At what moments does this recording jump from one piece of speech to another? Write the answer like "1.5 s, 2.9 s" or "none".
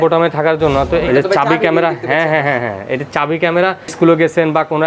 1.0 s, 3.9 s